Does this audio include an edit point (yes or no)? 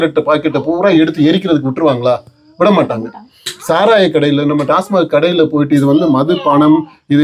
no